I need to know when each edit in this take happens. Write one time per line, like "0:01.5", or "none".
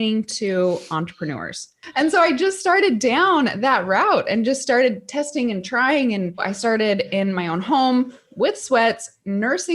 0:01.8
0:06.5

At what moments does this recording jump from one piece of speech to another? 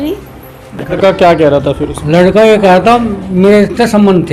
0:01.0

